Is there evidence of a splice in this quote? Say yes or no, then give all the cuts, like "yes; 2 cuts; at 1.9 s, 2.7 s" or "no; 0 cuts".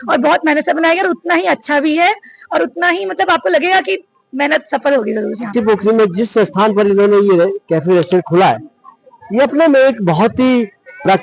yes; 1 cut; at 5.5 s